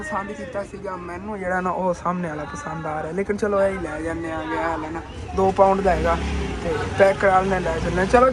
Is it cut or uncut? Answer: uncut